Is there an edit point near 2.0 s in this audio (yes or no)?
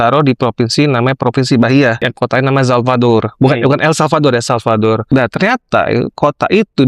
yes